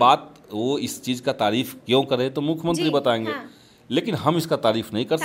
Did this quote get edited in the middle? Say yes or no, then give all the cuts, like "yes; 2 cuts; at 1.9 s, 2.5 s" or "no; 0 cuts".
no; 0 cuts